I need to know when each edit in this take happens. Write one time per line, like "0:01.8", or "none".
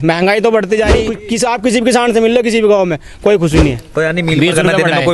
0:01.2
0:03.8